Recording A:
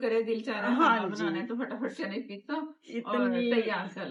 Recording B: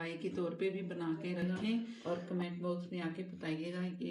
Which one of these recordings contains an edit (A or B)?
B